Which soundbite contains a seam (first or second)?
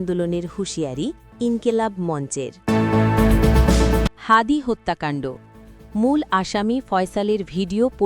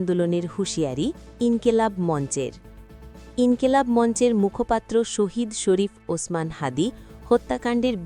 first